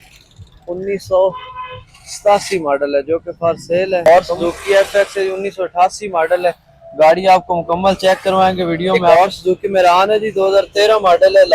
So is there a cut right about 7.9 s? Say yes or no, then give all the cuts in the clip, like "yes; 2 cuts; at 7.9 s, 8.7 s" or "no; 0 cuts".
no; 2 cuts; at 4.0 s, 9.1 s